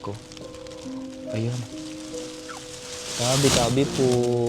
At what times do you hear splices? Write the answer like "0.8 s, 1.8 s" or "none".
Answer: none